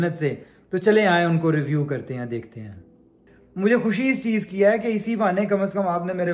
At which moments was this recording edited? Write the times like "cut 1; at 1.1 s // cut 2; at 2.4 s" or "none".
cut 1; at 3.2 s